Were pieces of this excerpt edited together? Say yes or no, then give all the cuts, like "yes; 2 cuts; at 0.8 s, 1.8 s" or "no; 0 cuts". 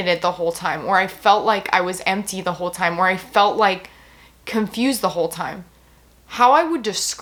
no; 0 cuts